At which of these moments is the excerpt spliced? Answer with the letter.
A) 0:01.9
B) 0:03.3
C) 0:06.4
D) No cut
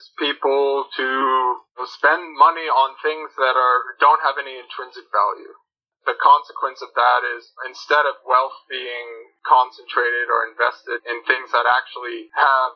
A